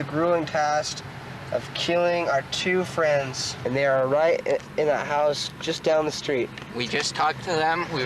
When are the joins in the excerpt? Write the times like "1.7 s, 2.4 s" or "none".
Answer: 3.4 s, 6.6 s